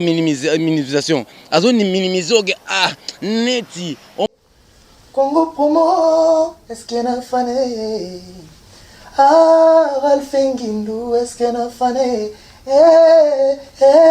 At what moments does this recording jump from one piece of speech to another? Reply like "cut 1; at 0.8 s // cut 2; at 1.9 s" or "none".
cut 1; at 4.3 s